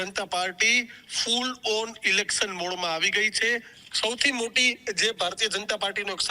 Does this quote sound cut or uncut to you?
cut